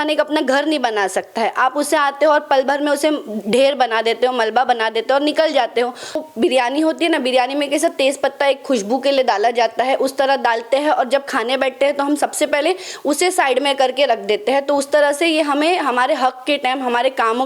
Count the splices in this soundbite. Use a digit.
1